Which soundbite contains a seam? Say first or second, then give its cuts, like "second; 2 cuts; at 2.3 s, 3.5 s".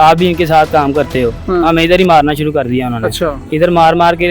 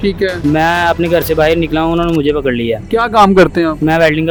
first; 1 cut; at 3.4 s